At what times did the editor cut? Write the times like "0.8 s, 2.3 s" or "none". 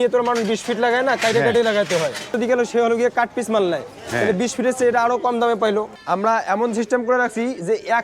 2.3 s, 5.9 s